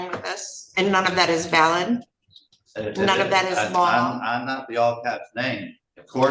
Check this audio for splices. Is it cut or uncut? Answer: uncut